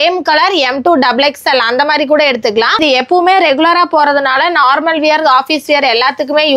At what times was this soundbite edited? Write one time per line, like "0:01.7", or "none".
0:02.8